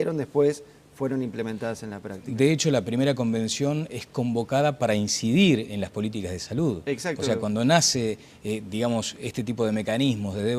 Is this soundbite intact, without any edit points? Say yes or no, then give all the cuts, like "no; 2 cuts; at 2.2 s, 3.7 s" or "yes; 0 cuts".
yes; 0 cuts